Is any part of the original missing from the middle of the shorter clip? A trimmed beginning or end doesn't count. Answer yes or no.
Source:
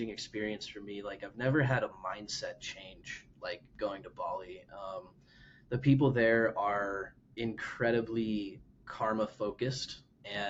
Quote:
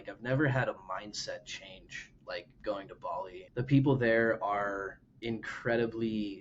yes